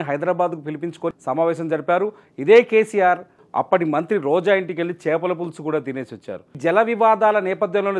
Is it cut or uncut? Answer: cut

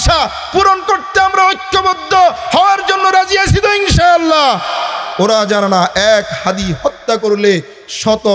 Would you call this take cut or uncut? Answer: cut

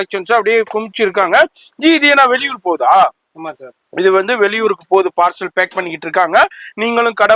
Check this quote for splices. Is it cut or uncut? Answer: uncut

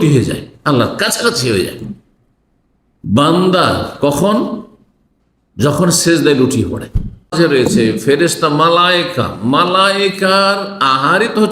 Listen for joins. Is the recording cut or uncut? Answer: cut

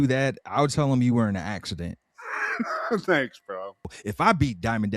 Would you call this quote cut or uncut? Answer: cut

